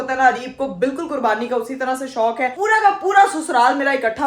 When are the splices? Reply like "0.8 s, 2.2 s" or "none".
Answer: 2.6 s